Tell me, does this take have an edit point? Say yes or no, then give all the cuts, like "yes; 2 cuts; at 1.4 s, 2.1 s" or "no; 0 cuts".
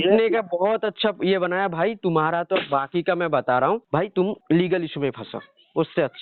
no; 0 cuts